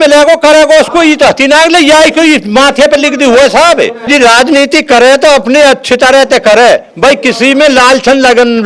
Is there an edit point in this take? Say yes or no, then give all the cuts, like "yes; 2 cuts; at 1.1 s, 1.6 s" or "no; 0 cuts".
yes; 1 cut; at 4.0 s